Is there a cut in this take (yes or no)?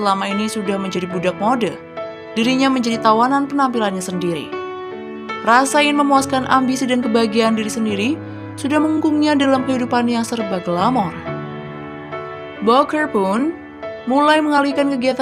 yes